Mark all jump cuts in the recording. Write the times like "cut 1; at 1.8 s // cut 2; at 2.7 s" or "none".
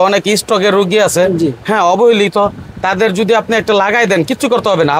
none